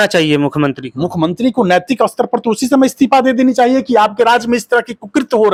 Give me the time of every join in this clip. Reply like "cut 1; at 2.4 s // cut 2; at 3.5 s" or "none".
none